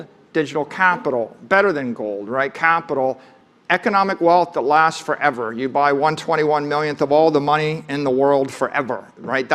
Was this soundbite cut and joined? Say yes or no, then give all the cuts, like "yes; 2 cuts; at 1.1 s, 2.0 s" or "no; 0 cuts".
no; 0 cuts